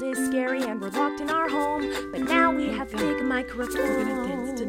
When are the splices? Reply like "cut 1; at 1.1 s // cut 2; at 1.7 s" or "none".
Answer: none